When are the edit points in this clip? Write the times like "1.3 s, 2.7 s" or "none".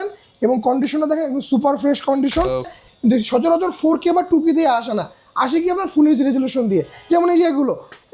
2.7 s

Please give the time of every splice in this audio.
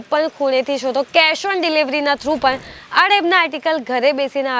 none

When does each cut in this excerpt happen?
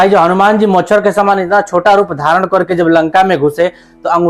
none

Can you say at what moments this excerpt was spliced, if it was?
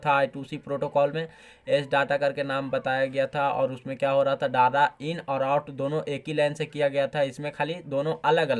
none

